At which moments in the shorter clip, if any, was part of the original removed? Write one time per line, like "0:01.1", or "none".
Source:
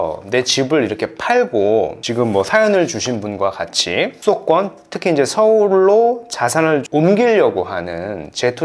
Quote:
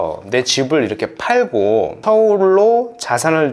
0:02.0